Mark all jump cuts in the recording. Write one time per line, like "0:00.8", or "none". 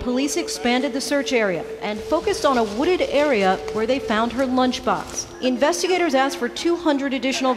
none